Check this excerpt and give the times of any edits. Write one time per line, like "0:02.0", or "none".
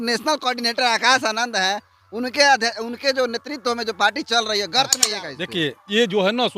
0:05.1